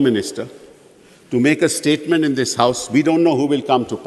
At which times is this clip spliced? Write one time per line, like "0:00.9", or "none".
none